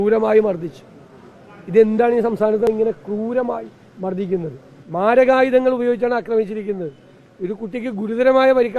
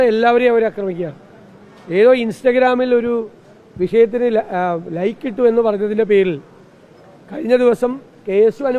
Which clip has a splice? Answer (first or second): first